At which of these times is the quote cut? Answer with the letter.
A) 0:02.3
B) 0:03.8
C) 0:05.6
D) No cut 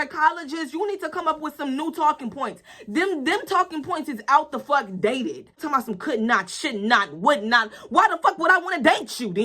C